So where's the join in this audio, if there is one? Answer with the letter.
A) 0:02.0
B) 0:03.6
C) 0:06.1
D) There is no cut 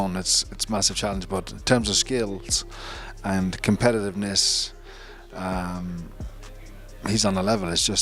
D